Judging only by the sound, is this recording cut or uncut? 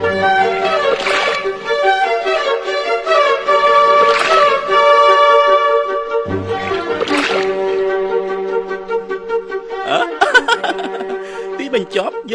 uncut